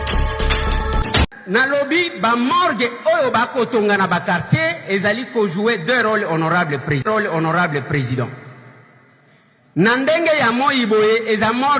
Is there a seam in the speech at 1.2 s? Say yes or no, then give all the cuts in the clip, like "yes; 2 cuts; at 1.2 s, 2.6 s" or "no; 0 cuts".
yes; 1 cut; at 1.2 s